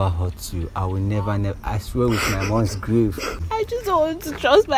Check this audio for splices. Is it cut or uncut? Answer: cut